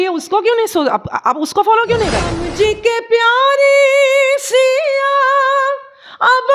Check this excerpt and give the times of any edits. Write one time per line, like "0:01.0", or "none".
0:02.4